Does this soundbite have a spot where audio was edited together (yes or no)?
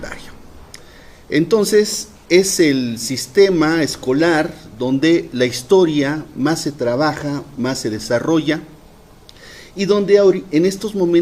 yes